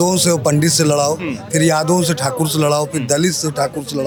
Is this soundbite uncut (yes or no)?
yes